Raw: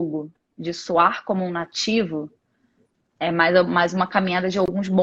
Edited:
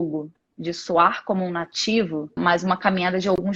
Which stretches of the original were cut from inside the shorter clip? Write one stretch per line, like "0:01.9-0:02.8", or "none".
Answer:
0:02.4-0:03.7